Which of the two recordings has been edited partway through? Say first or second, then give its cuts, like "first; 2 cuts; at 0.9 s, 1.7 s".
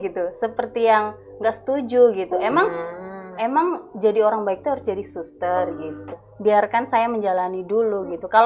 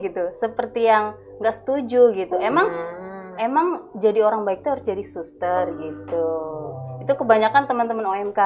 first; 1 cut; at 6.1 s